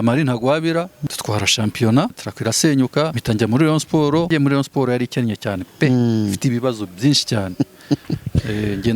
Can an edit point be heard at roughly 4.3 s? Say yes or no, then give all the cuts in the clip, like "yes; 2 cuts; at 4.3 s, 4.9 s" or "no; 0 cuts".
yes; 4 cuts; at 1.0 s, 2.3 s, 3.2 s, 4.3 s